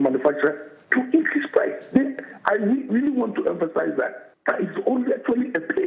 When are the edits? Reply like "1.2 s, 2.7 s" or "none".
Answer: 4.3 s

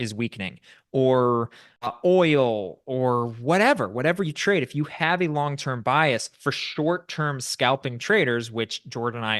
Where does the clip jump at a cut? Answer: 1.7 s

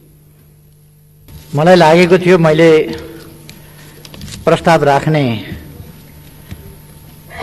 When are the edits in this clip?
1.3 s

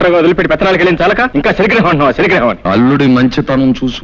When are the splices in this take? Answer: 1.3 s, 2.6 s

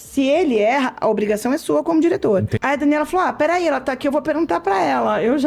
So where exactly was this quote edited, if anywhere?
2.5 s

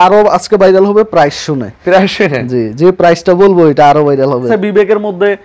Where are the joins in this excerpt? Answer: 4.5 s

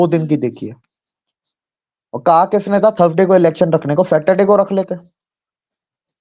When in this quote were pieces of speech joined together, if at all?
none

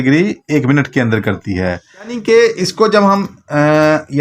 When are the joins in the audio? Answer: 2.2 s

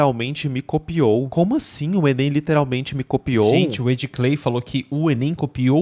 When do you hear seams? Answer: none

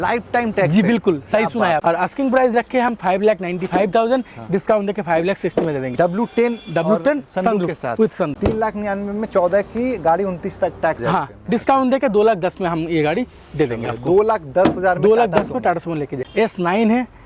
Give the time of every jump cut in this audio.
1.8 s, 5.9 s, 8.3 s, 11.0 s, 16.1 s

